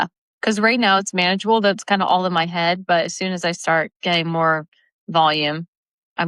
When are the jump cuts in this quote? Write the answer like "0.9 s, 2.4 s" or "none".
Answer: none